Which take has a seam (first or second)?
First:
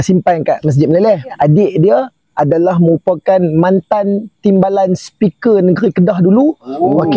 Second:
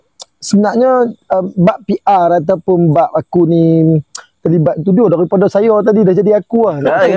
first